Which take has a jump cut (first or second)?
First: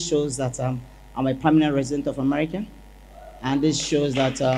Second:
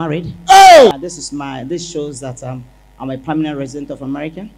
second